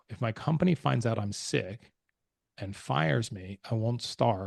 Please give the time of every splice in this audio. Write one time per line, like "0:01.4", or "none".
none